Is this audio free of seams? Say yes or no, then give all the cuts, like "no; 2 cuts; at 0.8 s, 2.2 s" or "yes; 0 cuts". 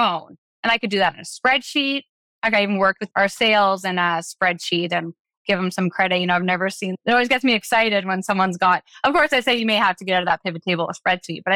no; 2 cuts; at 3.0 s, 6.9 s